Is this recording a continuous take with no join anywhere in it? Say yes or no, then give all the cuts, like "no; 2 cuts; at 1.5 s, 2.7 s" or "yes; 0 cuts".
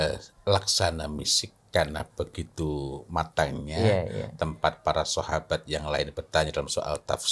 yes; 0 cuts